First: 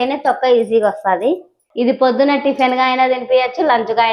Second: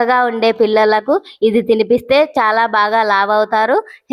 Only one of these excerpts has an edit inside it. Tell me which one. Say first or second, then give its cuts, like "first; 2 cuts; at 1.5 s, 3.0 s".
first; 1 cut; at 1.7 s